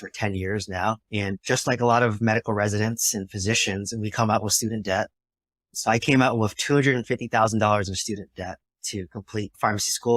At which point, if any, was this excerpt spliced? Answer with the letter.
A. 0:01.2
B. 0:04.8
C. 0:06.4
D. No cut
A